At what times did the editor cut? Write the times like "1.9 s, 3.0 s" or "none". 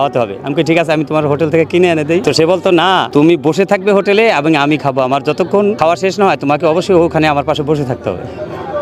2.2 s, 3.1 s, 5.8 s